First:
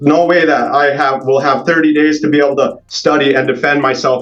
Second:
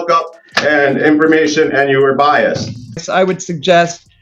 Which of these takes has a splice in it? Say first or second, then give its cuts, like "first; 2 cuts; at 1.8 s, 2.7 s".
second; 1 cut; at 3.0 s